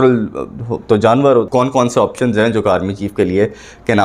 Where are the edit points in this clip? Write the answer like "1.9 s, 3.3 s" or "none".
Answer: 1.5 s